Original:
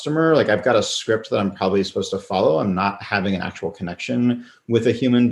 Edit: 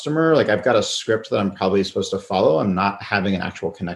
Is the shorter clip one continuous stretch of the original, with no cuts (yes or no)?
yes